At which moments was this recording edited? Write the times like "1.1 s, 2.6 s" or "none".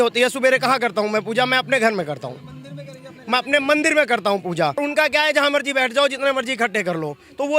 4.8 s